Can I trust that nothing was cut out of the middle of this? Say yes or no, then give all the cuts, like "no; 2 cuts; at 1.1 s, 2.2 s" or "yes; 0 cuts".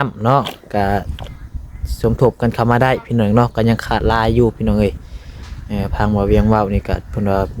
yes; 0 cuts